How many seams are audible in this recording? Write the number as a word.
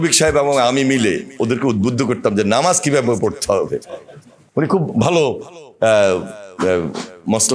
zero